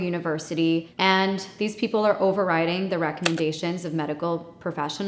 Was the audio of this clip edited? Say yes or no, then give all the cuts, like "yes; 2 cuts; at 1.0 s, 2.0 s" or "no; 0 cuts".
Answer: no; 0 cuts